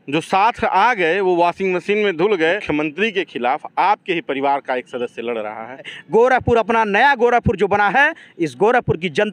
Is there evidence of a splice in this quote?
yes; 2 cuts; at 2.6 s, 5.9 s

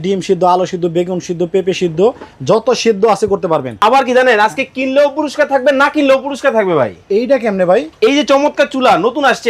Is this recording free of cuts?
no; 1 cut; at 3.7 s

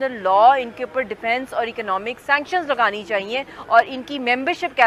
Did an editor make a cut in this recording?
no; 0 cuts

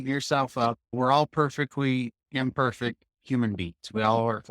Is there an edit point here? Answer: yes; 1 cut; at 0.9 s

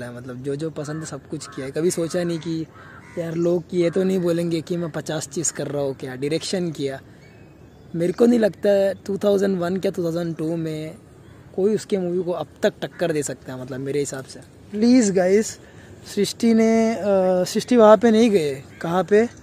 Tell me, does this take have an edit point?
yes; 1 cut; at 14.7 s

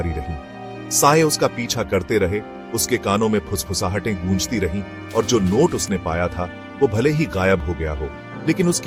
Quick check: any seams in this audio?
no; 0 cuts

